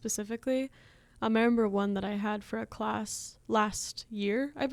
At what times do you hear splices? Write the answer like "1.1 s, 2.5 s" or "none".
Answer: none